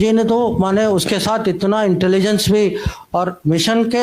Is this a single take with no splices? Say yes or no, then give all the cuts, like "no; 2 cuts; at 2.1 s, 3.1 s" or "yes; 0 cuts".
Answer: yes; 0 cuts